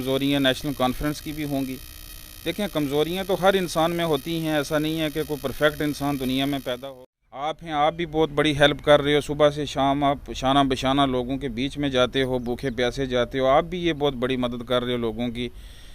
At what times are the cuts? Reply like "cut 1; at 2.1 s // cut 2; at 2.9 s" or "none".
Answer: cut 1; at 6.8 s